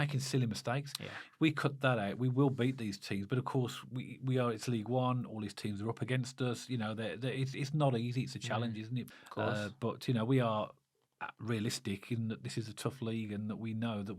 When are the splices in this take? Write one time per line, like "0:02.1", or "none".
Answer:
0:09.1